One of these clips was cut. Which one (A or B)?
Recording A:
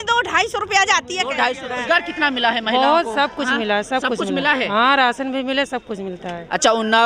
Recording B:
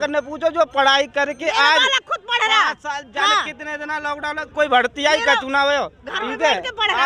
A